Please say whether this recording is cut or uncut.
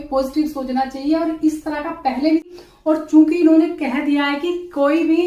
cut